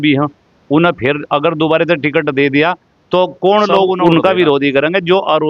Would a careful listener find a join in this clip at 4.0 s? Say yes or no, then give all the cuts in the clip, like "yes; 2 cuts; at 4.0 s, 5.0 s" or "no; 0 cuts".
yes; 1 cut; at 4.0 s